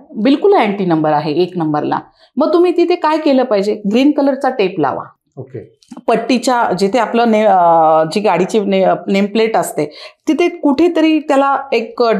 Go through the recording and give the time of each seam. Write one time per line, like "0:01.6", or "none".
none